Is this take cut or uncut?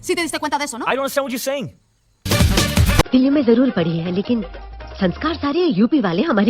cut